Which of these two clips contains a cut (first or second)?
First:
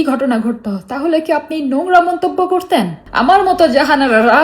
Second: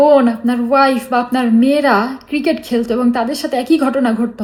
first